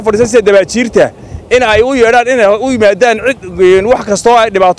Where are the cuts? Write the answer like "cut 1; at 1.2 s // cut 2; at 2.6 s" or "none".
none